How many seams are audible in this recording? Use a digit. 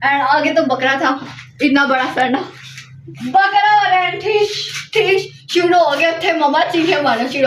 0